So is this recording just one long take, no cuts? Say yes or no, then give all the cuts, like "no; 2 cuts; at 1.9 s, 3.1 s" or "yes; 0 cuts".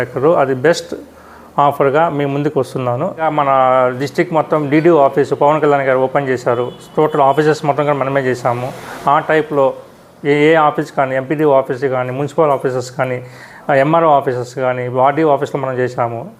no; 1 cut; at 3.2 s